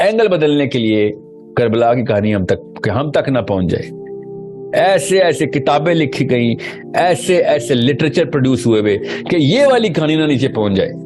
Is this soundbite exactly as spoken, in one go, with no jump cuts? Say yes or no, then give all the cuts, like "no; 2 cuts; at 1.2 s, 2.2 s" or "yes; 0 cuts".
yes; 0 cuts